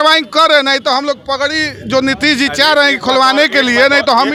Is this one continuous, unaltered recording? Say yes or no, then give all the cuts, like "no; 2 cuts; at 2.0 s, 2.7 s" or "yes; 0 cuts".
yes; 0 cuts